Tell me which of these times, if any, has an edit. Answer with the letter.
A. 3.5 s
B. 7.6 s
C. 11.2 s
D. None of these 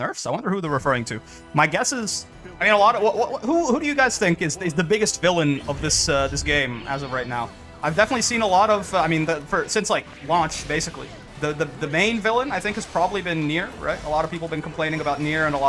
D